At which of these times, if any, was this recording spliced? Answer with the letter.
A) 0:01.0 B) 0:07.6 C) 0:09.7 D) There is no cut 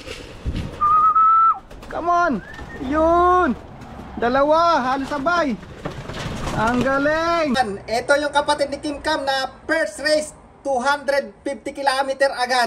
B